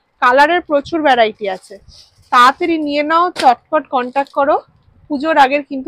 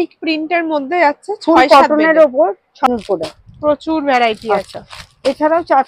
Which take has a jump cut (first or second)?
second